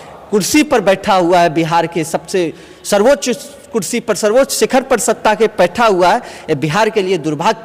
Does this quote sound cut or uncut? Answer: uncut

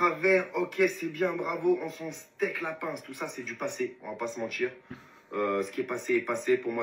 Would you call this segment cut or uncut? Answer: uncut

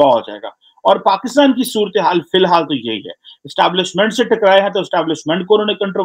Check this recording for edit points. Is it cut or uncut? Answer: uncut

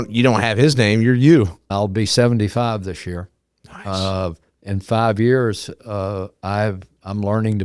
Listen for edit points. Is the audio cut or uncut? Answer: cut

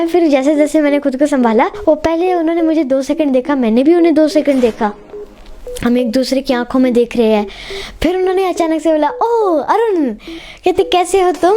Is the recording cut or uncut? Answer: cut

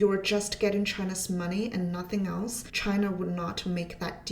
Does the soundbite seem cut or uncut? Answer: cut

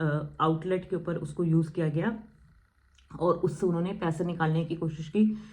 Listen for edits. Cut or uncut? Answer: uncut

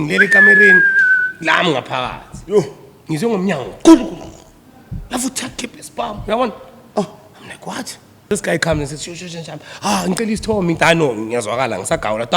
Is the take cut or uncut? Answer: cut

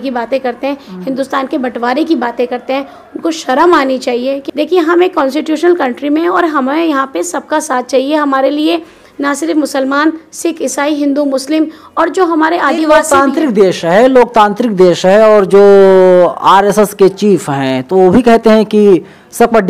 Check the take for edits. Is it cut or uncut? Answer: uncut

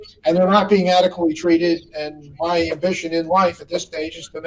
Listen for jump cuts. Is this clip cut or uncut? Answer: uncut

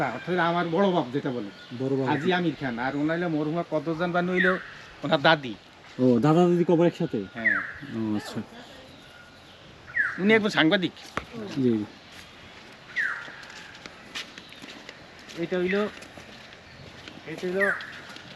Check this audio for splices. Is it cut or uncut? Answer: uncut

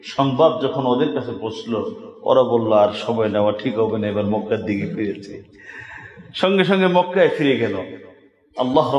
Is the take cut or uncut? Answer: uncut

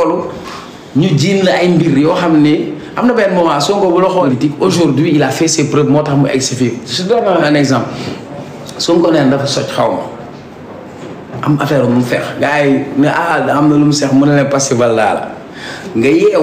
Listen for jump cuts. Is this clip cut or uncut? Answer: cut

